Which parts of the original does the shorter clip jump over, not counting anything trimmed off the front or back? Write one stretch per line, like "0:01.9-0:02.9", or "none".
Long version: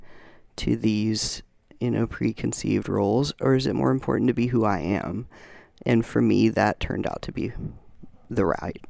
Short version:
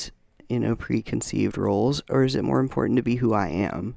none